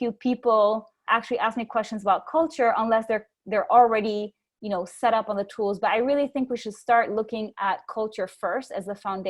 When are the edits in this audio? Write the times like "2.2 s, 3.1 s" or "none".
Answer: 0.9 s